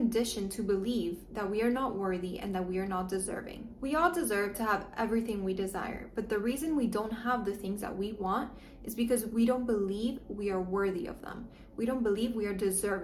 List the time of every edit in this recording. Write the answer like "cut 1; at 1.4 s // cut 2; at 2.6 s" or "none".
none